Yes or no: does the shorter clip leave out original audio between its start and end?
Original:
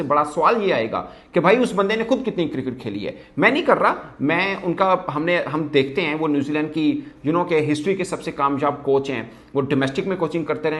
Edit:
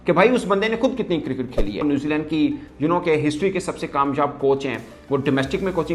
yes